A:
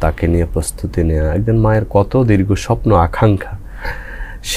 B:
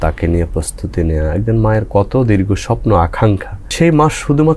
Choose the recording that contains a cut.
B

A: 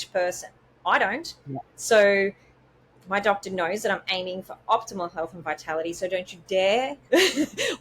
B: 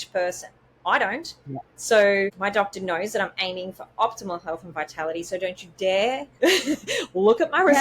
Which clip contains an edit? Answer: B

